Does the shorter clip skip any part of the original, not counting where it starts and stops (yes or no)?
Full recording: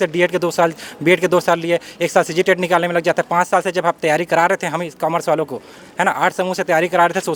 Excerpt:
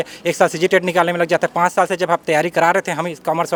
no